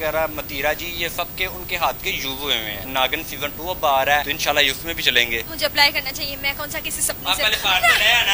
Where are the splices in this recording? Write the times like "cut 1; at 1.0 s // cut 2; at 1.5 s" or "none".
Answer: cut 1; at 2.8 s